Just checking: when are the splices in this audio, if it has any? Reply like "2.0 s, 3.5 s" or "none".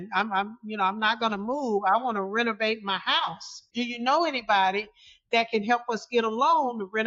3.7 s